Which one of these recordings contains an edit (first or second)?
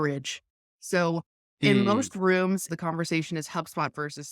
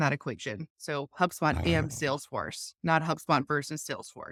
first